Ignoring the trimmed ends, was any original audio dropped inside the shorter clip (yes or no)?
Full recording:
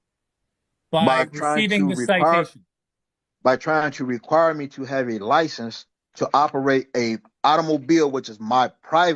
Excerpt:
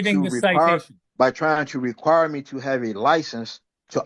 yes